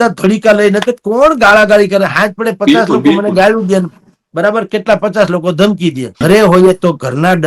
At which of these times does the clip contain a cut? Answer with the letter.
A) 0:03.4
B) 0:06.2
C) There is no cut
B